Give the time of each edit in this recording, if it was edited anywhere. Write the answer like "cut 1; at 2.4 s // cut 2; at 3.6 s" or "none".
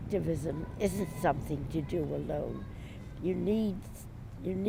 none